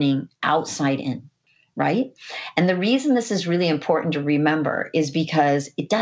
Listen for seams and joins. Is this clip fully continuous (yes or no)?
no